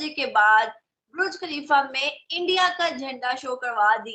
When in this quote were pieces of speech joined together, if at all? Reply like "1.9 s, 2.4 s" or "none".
none